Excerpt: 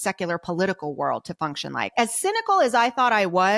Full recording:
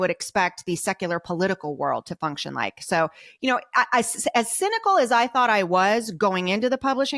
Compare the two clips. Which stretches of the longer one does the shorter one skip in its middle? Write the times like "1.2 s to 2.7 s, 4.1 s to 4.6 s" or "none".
2.8 s to 4.3 s